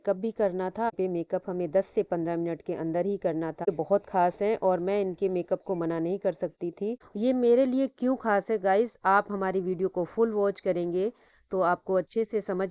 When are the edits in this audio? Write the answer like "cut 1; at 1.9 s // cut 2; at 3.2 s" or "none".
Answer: cut 1; at 0.9 s // cut 2; at 3.7 s // cut 3; at 7.1 s